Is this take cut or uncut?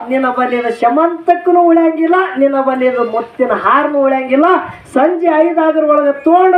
uncut